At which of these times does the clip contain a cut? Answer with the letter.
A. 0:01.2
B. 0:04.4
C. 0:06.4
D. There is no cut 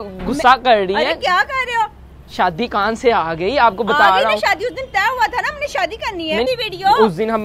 C